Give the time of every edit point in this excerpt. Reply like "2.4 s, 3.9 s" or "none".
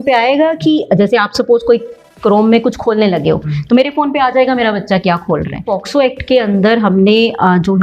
5.6 s